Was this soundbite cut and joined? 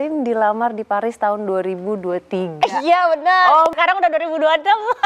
yes; 1 cut; at 3.7 s

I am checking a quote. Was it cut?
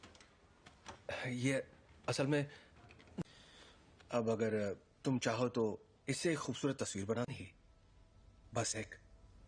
no; 0 cuts

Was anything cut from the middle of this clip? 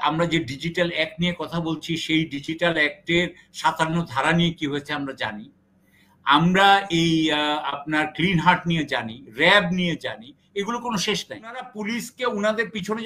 yes; 1 cut; at 11.7 s

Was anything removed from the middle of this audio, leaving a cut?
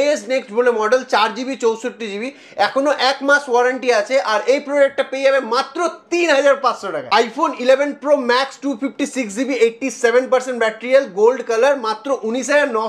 yes; 1 cut; at 7.0 s

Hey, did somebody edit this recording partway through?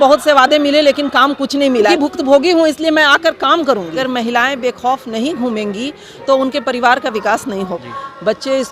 yes; 3 cuts; at 1.9 s, 4.0 s, 7.7 s

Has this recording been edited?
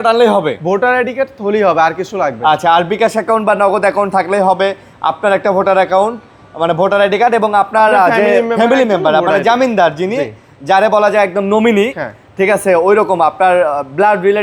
no; 0 cuts

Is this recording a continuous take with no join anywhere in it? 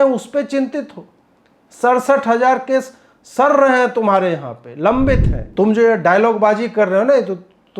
no; 1 cut; at 5.4 s

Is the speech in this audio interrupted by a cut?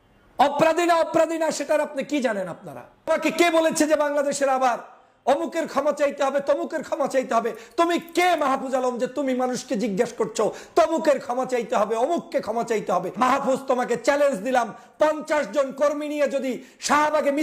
yes; 2 cuts; at 3.1 s, 13.1 s

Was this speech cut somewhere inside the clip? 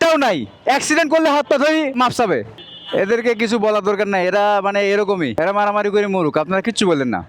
yes; 1 cut; at 2.6 s

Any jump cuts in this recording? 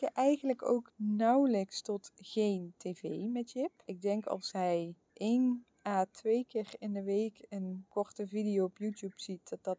yes; 5 cuts; at 0.9 s, 3.9 s, 5.0 s, 5.7 s, 7.8 s

